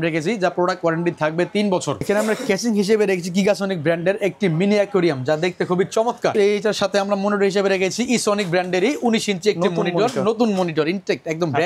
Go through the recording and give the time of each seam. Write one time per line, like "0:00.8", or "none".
0:02.0
0:06.3